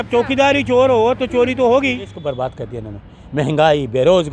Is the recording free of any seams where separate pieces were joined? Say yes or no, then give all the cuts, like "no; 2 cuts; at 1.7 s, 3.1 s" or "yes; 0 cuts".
no; 1 cut; at 2.2 s